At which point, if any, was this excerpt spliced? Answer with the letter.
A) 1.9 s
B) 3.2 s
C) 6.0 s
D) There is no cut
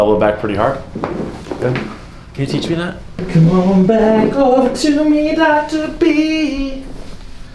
B